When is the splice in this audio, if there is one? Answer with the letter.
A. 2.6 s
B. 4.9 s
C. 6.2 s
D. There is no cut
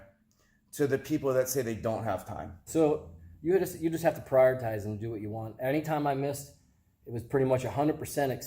A